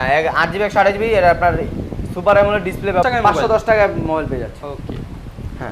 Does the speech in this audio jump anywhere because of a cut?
yes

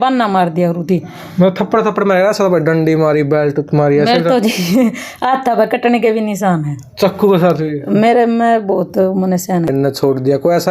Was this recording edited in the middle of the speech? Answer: yes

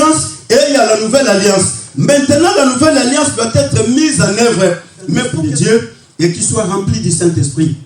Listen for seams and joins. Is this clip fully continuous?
no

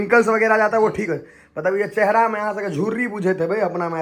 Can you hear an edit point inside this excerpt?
no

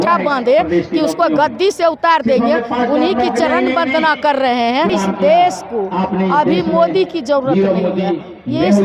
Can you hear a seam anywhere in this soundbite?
yes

